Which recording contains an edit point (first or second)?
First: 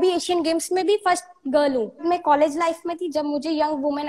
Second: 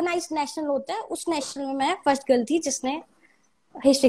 first